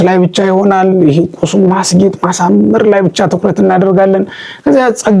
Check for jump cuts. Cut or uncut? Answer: uncut